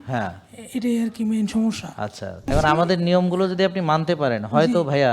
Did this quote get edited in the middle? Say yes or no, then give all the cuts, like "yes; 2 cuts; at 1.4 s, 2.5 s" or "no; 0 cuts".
yes; 1 cut; at 2.4 s